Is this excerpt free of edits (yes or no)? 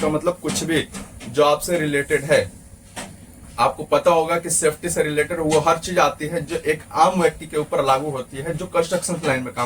yes